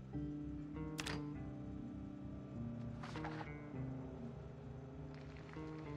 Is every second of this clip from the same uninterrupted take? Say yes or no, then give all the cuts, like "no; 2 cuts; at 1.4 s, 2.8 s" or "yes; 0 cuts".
yes; 0 cuts